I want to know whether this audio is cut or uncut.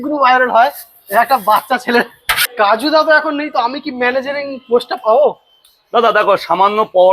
cut